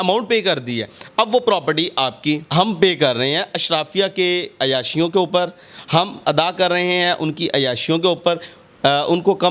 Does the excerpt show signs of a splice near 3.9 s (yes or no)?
no